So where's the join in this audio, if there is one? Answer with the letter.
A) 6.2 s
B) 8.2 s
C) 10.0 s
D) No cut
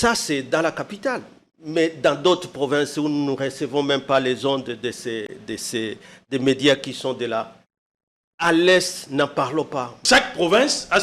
C